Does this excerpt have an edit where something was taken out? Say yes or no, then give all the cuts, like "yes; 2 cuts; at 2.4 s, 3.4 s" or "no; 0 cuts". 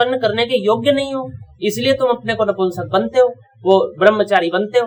no; 0 cuts